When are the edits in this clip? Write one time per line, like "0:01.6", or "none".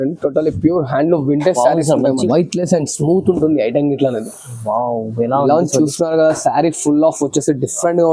0:02.2